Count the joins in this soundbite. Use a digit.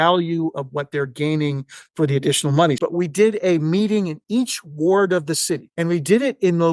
2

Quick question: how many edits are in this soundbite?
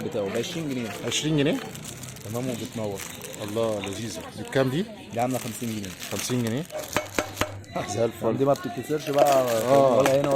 2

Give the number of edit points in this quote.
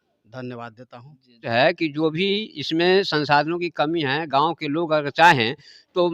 1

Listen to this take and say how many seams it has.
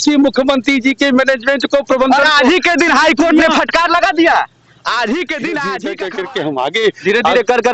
1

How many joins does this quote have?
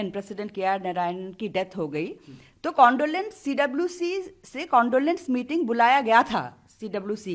0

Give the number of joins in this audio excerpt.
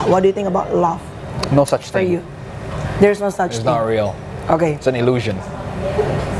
0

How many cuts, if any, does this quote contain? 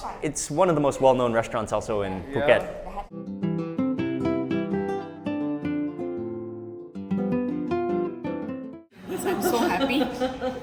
2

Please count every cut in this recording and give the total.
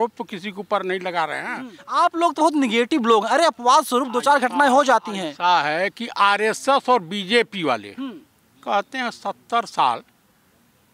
1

